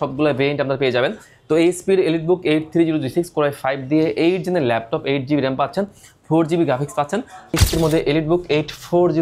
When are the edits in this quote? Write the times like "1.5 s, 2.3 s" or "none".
7.5 s